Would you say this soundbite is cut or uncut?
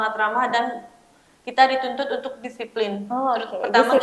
uncut